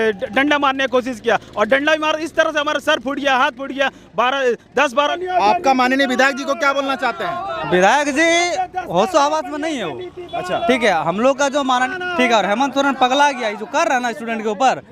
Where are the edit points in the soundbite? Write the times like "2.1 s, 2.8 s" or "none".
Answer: 5.1 s, 11.9 s